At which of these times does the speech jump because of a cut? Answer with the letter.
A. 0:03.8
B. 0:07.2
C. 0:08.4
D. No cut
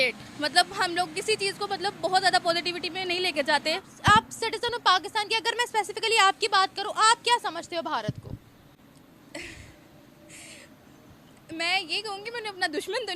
A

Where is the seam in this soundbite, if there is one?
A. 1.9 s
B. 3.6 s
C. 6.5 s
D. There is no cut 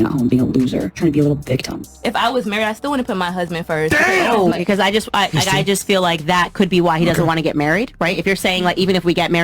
A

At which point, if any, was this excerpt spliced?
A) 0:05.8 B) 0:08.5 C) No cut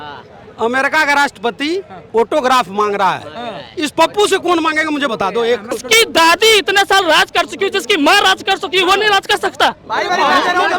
A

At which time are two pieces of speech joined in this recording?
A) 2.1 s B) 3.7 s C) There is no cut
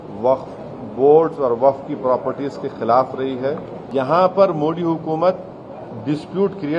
B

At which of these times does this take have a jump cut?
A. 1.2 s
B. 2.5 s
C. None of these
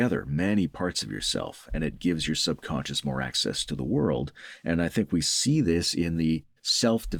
C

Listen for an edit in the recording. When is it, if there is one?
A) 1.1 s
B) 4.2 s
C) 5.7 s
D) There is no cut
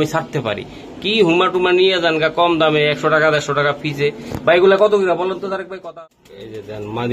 C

